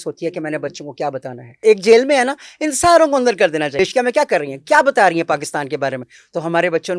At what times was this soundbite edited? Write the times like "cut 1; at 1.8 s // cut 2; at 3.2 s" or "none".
cut 1; at 1.6 s // cut 2; at 3.7 s